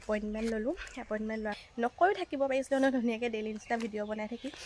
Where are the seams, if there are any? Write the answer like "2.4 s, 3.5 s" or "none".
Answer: 1.6 s